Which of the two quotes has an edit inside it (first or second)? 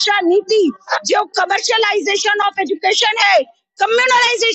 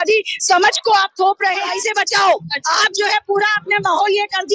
second